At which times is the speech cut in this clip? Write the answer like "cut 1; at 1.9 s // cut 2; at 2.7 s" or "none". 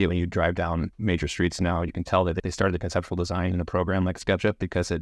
cut 1; at 0.9 s // cut 2; at 2.4 s